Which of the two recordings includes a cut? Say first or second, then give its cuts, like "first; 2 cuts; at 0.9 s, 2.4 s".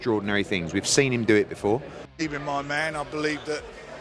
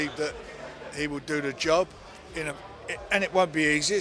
first; 1 cut; at 2.0 s